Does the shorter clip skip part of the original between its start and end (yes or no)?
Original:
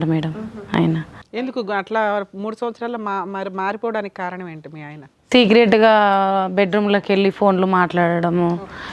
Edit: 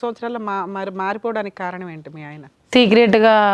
no